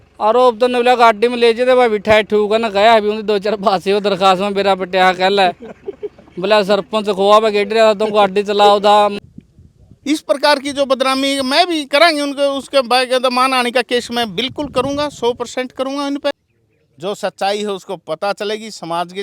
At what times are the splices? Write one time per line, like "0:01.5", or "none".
0:09.1
0:16.3